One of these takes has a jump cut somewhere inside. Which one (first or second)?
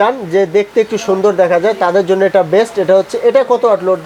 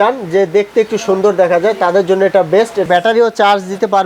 second